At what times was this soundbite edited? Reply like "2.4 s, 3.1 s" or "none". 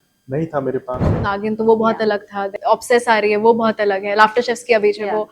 1.3 s, 2.5 s